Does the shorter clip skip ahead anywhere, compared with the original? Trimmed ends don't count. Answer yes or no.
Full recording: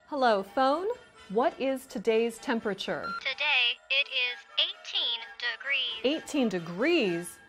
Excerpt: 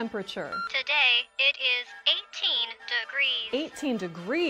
no